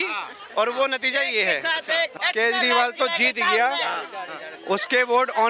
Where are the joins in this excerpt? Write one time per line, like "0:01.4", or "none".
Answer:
0:02.1

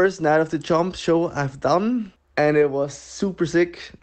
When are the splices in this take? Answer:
0:02.2

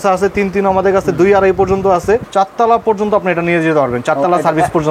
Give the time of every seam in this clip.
0:02.3

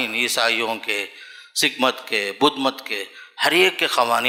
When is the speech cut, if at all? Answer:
none

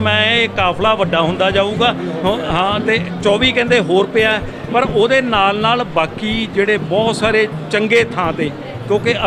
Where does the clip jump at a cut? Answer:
none

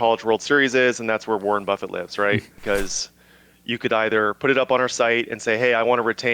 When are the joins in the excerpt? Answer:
0:02.6

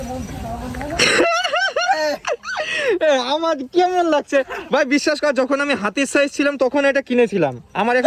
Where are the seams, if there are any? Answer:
none

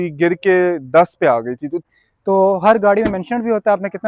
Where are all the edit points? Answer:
0:01.8

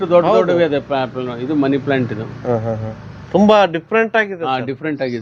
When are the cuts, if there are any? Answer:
none

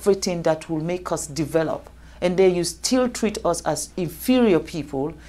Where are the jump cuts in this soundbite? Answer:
none

